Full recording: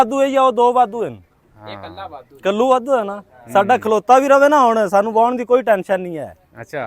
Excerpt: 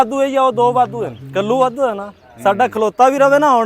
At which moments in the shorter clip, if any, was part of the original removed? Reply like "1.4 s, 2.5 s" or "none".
1.2 s